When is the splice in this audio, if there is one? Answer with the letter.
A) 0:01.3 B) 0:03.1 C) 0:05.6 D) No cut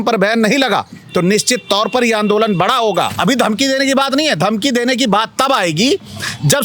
B